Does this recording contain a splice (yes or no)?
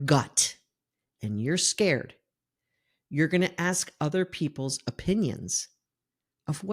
no